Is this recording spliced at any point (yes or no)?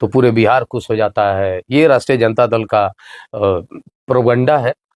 no